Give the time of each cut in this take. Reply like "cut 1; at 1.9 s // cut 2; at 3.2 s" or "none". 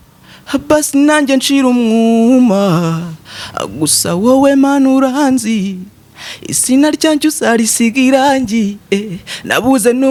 none